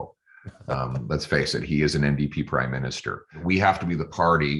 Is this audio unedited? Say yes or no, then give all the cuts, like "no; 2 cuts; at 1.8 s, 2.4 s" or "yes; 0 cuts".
no; 1 cut; at 3.4 s